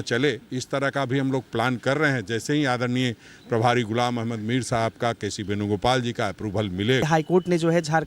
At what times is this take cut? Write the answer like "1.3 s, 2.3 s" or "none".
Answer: 7.1 s

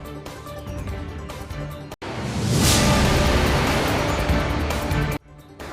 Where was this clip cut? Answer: 1.3 s

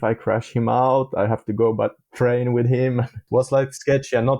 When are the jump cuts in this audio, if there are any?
3.2 s

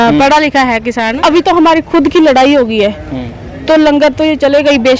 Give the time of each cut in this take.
1.1 s

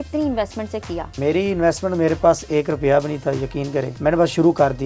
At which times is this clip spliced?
1.2 s, 3.9 s

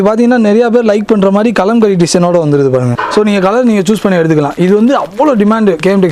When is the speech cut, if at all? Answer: 3.0 s

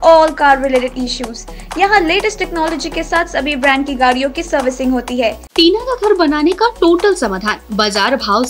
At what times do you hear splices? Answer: 5.4 s

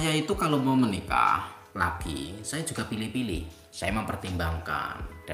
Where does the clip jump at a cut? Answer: none

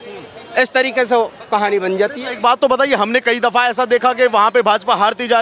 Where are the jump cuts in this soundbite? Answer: none

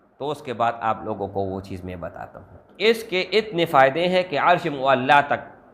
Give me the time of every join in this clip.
2.6 s

